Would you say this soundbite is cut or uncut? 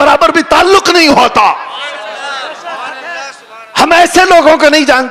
uncut